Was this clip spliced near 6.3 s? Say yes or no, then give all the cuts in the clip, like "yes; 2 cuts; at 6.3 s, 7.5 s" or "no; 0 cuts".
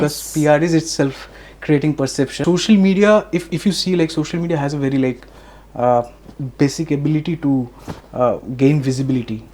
no; 1 cut; at 2.4 s